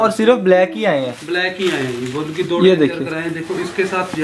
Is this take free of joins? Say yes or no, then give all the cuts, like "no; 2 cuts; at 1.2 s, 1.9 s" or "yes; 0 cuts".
yes; 0 cuts